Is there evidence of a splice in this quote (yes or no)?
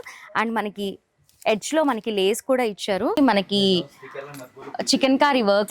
yes